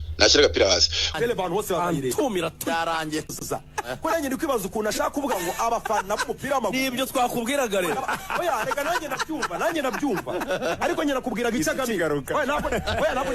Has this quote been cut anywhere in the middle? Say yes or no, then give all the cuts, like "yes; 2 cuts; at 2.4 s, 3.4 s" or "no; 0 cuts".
yes; 1 cut; at 1.1 s